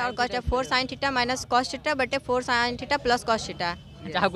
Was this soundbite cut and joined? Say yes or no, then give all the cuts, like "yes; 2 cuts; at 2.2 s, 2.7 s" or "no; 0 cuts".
no; 0 cuts